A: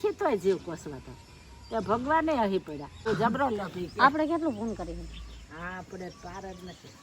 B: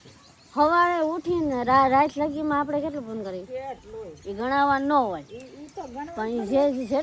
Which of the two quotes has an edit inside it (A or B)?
A